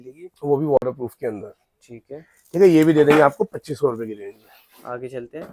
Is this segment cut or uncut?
uncut